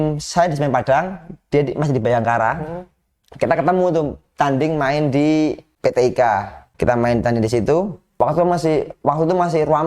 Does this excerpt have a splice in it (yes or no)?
yes